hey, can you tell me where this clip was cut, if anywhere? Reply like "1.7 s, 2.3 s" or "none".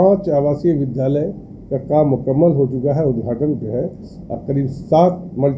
none